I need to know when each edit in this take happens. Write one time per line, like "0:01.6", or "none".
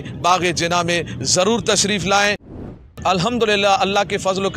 0:02.6